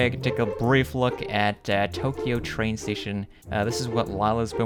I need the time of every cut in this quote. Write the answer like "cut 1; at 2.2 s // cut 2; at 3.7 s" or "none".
none